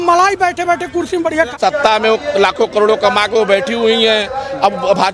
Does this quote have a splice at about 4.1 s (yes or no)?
no